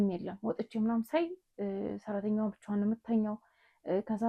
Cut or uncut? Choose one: uncut